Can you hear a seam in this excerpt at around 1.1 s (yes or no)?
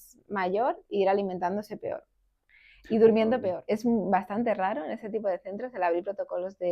no